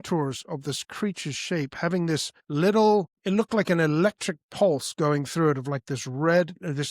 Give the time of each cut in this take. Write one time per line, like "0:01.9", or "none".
0:02.4
0:03.1